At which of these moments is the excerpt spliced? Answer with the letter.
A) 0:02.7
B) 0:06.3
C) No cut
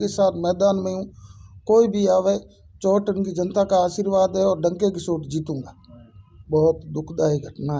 B